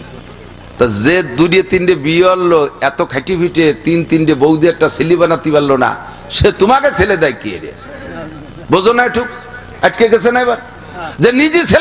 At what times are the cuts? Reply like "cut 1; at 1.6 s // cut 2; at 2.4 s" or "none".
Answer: none